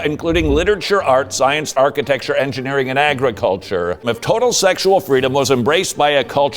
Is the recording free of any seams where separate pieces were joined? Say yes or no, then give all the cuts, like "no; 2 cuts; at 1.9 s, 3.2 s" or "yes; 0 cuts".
no; 2 cuts; at 1.7 s, 4.1 s